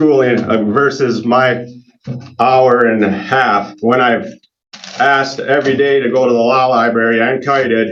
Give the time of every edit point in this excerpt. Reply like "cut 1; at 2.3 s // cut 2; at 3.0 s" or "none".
none